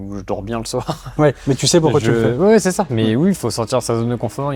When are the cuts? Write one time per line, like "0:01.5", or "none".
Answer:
none